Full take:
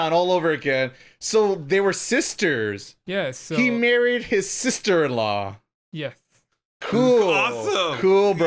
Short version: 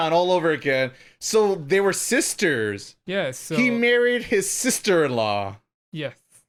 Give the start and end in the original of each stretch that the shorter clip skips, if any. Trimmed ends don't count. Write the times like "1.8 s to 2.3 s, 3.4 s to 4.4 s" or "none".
none